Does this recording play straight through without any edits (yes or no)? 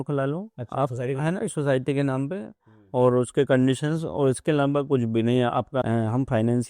no